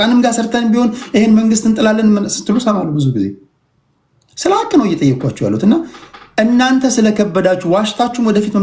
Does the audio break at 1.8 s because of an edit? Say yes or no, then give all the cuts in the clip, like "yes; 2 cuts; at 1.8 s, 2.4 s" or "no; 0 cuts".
no; 0 cuts